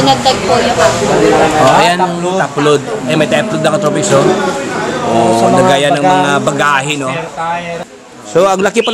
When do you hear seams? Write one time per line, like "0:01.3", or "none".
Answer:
0:07.8